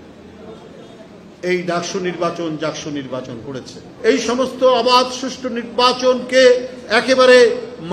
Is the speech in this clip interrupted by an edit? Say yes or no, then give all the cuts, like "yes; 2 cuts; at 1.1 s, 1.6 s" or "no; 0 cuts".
yes; 1 cut; at 3.9 s